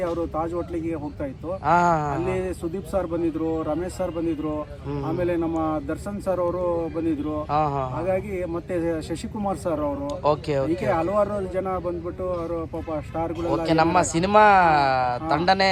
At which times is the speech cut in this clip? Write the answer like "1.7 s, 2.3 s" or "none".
none